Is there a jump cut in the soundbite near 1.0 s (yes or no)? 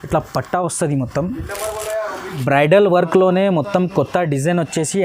no